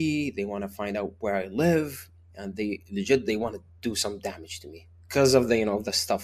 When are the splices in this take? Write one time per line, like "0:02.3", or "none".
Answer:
none